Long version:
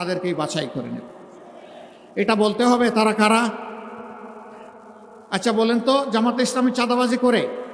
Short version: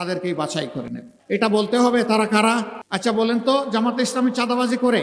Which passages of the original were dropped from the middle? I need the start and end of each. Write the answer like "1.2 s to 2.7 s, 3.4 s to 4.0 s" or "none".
1.1 s to 2.0 s, 3.7 s to 5.2 s